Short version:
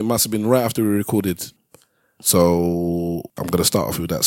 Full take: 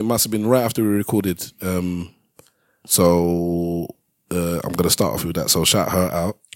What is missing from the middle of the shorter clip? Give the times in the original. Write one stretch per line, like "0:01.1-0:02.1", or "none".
0:01.5-0:02.2
0:04.0-0:04.7